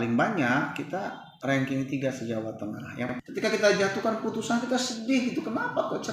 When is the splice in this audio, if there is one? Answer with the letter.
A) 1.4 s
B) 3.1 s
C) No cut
B